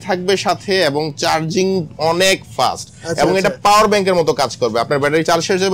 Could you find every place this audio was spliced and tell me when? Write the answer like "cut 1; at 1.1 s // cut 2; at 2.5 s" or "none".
none